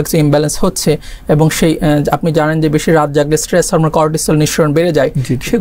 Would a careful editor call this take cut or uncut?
uncut